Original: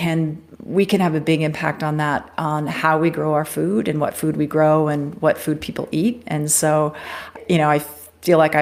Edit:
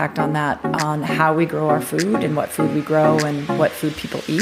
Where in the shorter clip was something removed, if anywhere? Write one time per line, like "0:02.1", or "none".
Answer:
none